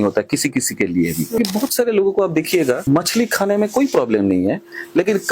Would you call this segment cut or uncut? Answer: cut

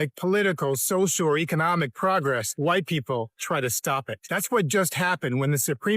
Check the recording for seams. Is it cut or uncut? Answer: cut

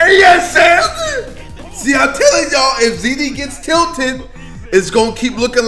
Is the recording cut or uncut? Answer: uncut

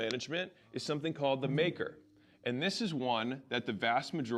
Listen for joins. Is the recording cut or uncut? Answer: uncut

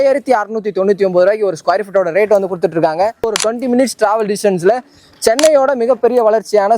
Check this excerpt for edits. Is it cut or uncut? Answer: cut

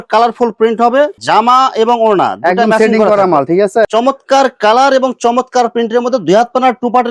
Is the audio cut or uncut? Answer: cut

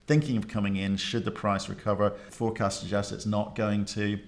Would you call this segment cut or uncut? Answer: cut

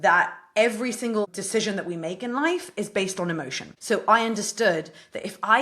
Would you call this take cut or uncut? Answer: cut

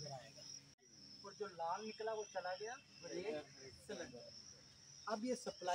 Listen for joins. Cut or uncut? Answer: cut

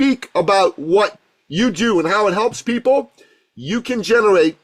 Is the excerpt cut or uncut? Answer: uncut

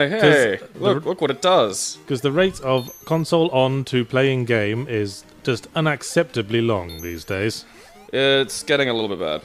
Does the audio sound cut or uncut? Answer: cut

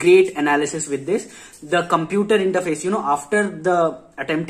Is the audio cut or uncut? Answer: uncut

